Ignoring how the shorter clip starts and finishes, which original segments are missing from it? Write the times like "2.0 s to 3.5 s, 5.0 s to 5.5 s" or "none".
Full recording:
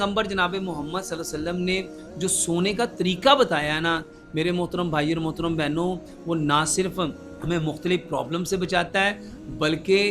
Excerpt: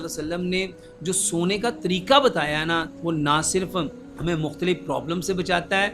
4.1 s to 6.2 s